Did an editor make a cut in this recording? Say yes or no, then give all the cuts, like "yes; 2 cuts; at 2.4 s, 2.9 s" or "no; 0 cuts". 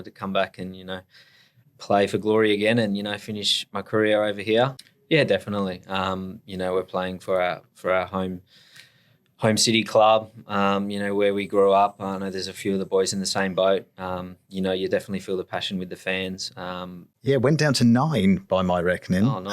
yes; 2 cuts; at 4.8 s, 17.1 s